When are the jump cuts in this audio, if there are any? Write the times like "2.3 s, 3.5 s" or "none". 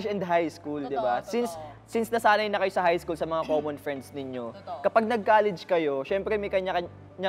none